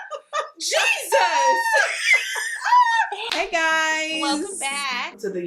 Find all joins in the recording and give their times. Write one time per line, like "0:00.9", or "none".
0:03.2